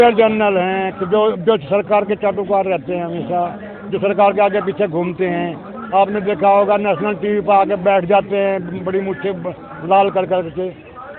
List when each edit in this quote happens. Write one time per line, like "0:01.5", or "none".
none